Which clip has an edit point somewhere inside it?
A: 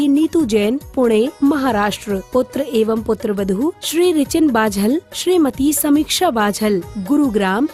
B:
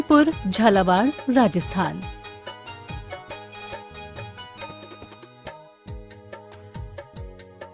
B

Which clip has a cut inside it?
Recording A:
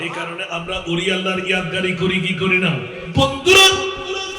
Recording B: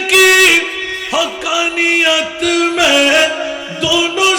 A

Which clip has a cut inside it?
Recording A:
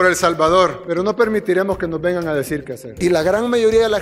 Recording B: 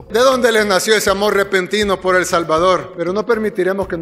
A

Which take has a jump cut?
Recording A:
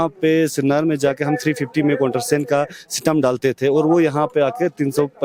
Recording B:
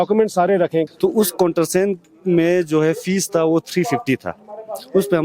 B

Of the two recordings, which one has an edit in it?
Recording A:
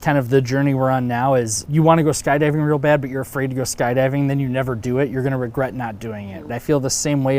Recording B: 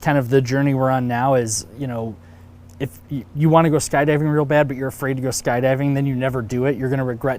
A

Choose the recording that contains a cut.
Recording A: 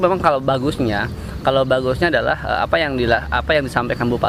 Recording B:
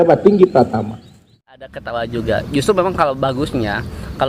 B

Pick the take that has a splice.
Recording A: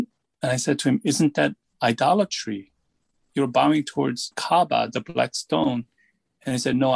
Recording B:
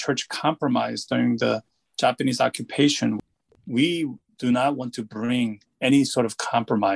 B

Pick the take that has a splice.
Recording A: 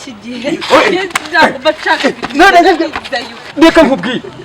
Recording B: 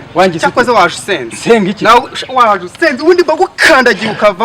A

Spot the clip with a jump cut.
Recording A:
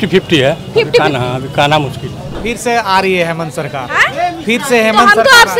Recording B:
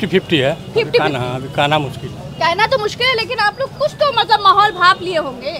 A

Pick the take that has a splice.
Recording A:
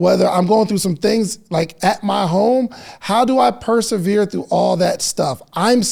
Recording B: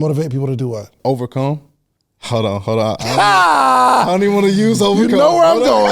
B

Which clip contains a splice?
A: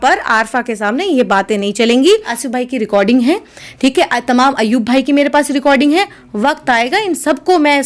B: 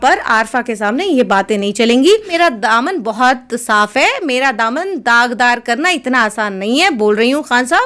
A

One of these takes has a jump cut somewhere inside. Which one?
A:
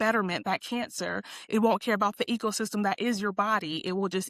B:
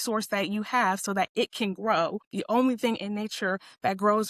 B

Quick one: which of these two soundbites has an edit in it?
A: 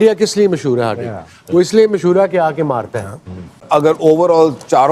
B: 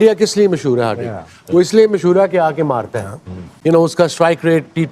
A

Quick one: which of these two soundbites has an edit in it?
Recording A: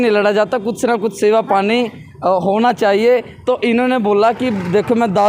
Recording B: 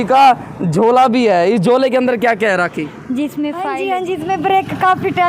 B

